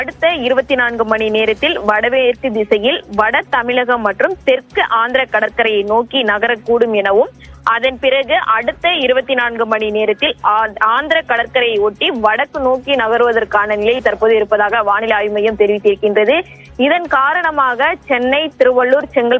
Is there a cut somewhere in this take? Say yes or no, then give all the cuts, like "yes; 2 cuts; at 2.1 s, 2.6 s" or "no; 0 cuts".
no; 0 cuts